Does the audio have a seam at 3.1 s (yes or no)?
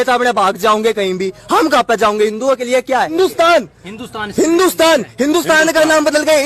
yes